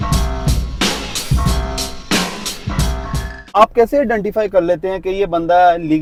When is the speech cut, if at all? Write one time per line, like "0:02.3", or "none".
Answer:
none